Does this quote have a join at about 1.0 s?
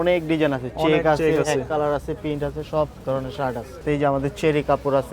no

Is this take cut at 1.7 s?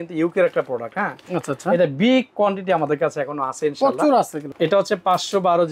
no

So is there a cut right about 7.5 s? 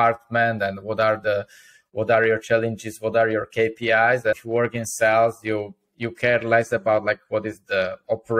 no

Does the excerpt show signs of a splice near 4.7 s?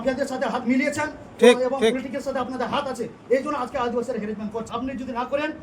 yes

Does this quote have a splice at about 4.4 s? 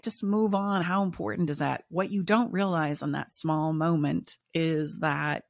yes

